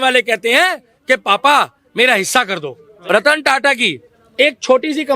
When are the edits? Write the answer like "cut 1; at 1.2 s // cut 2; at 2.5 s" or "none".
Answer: cut 1; at 2.9 s